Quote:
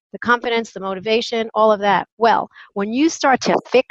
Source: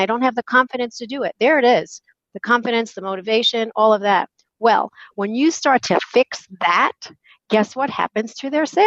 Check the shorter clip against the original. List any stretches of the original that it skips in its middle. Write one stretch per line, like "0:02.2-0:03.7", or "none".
0:04.3-0:04.5